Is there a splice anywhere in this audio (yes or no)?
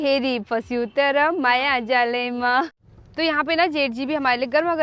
yes